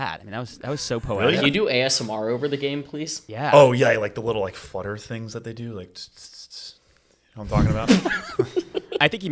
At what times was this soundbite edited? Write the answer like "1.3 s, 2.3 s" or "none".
none